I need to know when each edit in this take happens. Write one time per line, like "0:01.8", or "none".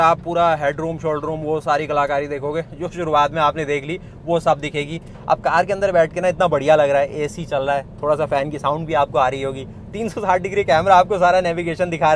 none